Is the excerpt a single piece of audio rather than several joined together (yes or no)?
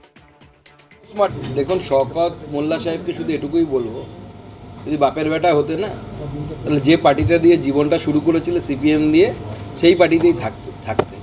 no